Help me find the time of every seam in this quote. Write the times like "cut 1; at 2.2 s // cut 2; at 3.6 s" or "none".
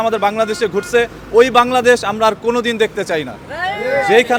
none

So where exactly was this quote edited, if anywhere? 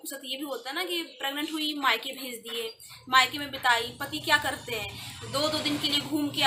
none

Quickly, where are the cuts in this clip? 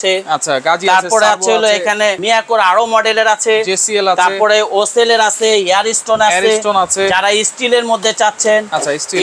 cut 1; at 2.2 s

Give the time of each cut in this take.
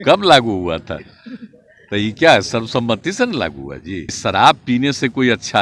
cut 1; at 4.2 s

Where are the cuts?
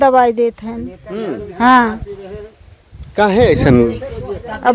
none

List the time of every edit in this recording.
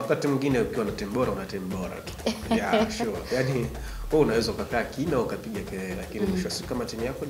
none

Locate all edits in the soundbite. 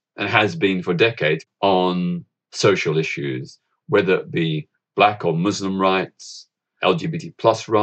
cut 1; at 1.4 s

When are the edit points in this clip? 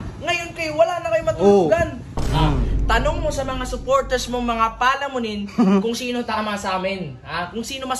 cut 1; at 2.1 s

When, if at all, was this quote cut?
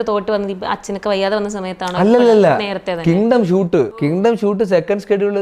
cut 1; at 4.0 s

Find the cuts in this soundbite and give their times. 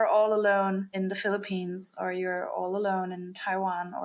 cut 1; at 0.9 s

